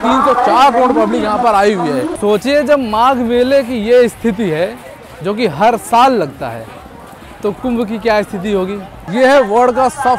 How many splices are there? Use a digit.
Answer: 2